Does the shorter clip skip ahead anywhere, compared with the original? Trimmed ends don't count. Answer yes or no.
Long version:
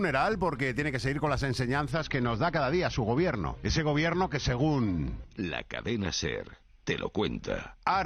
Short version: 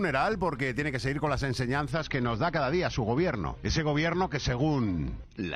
no